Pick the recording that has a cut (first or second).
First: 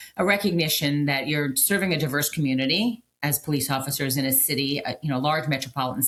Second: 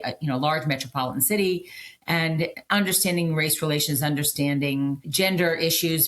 second